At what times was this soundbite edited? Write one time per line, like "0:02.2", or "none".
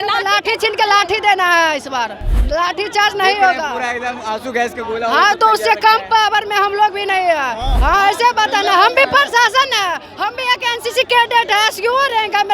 0:02.3
0:07.7